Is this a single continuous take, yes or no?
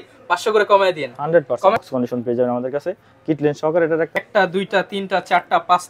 no